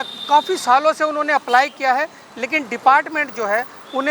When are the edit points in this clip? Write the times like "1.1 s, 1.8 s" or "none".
none

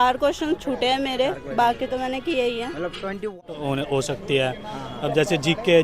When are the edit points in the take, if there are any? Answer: 3.4 s

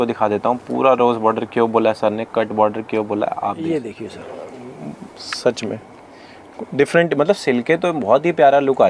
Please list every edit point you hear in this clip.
3.6 s

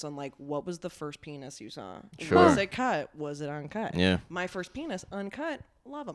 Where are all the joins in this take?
none

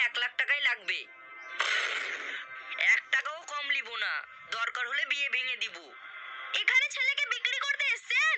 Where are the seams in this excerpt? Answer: none

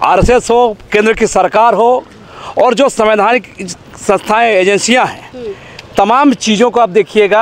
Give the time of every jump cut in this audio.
none

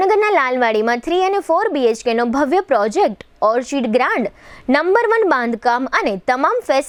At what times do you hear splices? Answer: none

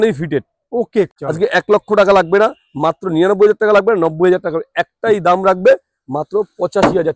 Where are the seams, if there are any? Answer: 1.1 s

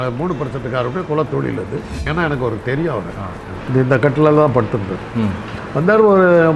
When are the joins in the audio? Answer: 2.0 s, 3.5 s, 5.5 s

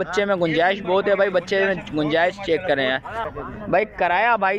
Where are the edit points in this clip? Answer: 3.2 s

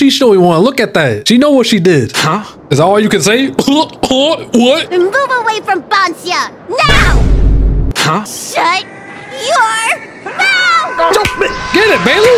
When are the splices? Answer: 2.1 s, 4.9 s

